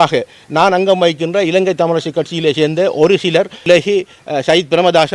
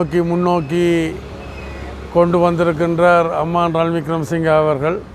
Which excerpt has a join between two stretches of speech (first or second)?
first